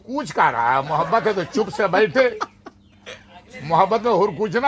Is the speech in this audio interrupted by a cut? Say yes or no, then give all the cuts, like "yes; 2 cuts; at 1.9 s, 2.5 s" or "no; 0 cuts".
no; 0 cuts